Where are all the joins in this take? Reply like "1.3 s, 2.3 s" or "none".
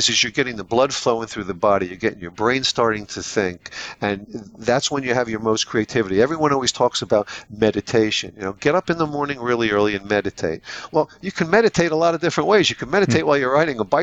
none